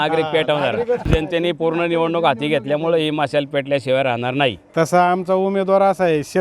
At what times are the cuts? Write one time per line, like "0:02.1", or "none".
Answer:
0:01.0
0:04.6